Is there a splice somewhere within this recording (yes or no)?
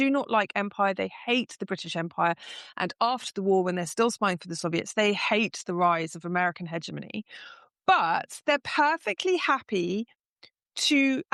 no